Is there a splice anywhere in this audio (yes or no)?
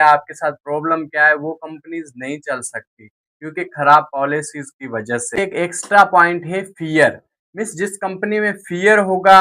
yes